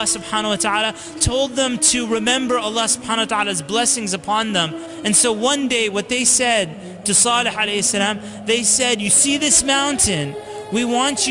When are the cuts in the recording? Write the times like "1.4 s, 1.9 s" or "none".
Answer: 4.8 s